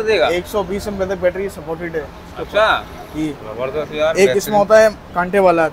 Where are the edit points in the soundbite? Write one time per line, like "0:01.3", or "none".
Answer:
none